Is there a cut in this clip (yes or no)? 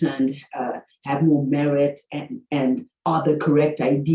no